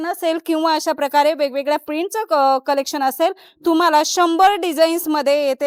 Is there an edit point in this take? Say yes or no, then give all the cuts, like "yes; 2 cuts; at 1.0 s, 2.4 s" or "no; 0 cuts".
no; 0 cuts